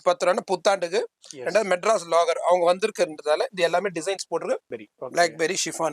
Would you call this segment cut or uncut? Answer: cut